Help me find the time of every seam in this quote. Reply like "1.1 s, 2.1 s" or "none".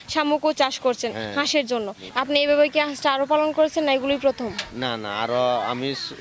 2.0 s